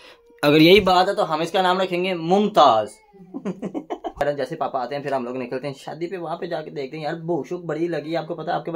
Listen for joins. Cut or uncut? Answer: cut